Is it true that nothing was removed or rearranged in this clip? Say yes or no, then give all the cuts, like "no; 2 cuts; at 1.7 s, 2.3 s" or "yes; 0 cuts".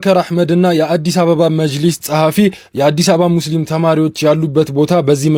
yes; 0 cuts